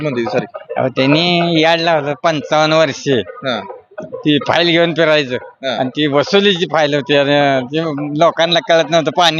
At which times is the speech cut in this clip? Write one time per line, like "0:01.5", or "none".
none

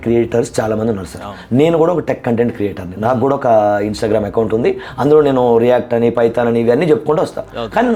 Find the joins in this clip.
none

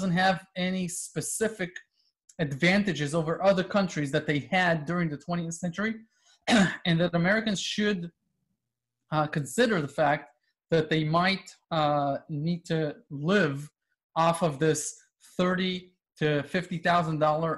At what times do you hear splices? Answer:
none

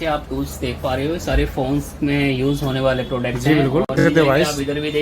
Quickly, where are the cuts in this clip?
0:04.0

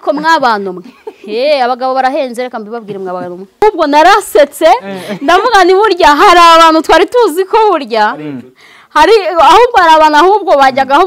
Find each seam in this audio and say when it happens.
0:03.6

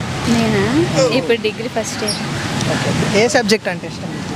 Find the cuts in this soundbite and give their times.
none

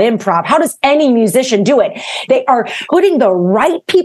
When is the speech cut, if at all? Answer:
0:02.4

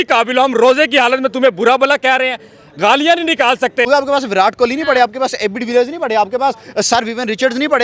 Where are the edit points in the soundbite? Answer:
0:03.9

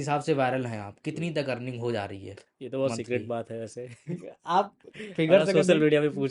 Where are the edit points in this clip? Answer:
none

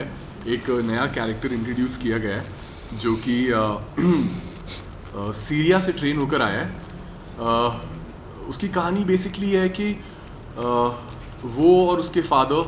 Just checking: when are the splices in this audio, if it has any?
none

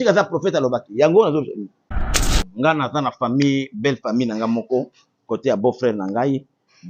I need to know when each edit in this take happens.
0:02.2

